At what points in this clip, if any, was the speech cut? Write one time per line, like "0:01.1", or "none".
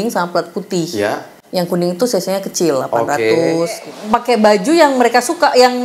0:01.4
0:03.9